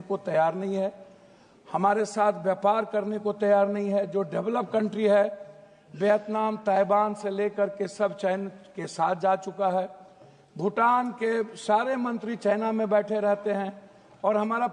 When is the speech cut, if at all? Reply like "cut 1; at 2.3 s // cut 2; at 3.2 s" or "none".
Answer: none

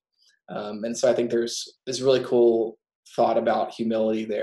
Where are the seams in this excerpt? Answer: cut 1; at 1.7 s

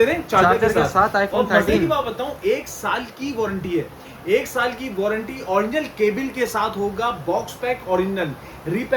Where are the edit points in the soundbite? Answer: none

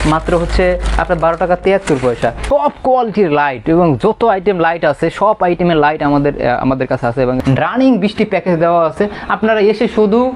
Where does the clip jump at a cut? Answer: cut 1; at 2.4 s // cut 2; at 7.4 s

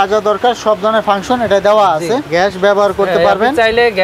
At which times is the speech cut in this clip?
cut 1; at 2.3 s

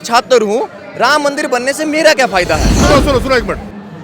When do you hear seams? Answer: cut 1; at 2.8 s

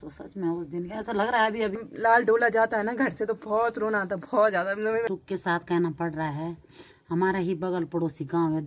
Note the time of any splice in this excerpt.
cut 1; at 1.8 s // cut 2; at 5.1 s

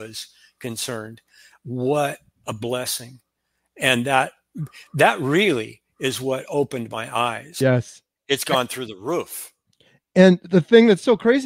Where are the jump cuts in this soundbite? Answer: cut 1; at 7.5 s

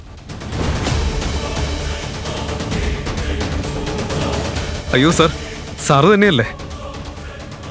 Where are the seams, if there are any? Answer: cut 1; at 4.7 s

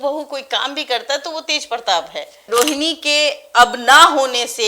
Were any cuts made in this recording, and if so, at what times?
cut 1; at 2.4 s

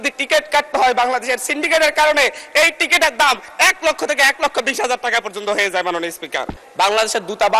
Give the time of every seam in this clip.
cut 1; at 6.6 s

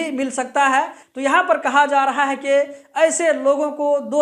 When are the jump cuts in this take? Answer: cut 1; at 1.0 s

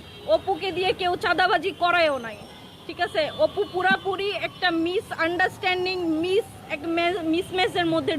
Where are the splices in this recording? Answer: none

